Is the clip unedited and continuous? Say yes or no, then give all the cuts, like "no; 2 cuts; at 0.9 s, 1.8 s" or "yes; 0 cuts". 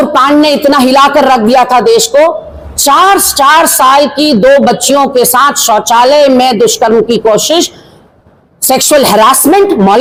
yes; 0 cuts